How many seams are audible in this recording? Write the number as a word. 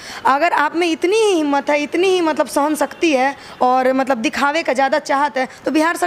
zero